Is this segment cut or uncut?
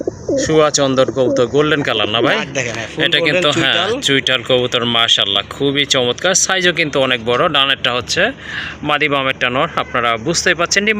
uncut